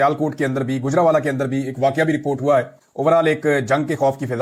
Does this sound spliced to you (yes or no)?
no